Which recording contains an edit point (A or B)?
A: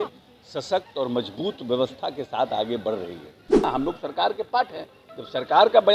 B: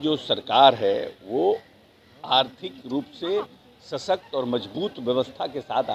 A